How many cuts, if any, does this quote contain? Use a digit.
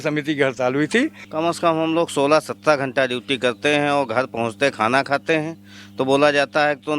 1